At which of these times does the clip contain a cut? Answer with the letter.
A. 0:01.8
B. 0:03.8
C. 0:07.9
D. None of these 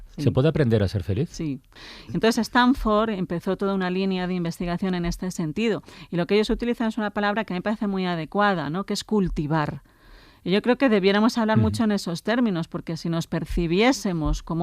A